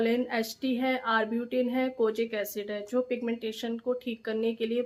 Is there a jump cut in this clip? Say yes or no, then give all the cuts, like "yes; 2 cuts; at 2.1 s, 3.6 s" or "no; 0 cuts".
no; 0 cuts